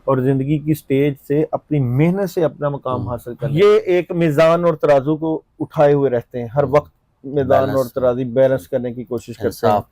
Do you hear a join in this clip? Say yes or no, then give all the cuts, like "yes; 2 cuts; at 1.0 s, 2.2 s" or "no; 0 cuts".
yes; 1 cut; at 3.4 s